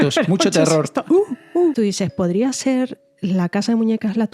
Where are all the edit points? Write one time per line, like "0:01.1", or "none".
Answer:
0:01.7

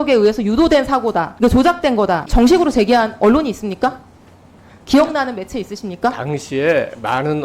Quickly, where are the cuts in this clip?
0:01.3
0:02.3

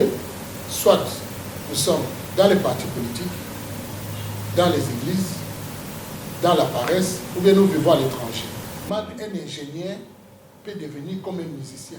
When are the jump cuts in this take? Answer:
0:08.8

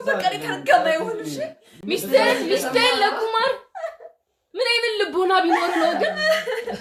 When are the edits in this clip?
none

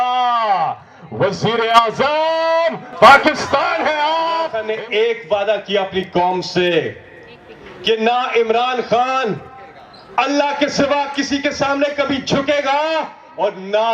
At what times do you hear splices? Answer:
0:04.6

